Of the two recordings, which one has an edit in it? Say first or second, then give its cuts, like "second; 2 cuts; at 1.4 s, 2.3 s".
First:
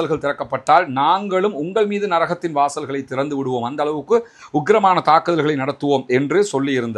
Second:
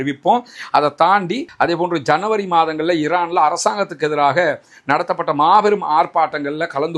second; 1 cut; at 1.5 s